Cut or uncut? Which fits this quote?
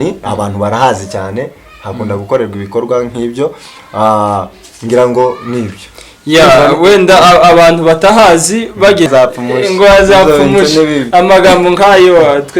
cut